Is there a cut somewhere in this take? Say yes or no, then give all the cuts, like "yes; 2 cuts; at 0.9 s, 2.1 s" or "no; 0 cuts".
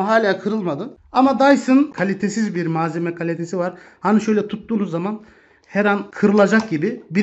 yes; 3 cuts; at 0.9 s, 1.9 s, 6.1 s